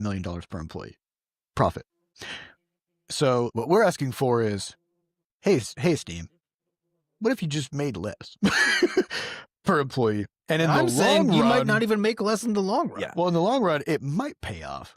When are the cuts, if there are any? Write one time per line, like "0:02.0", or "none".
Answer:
0:02.1
0:03.5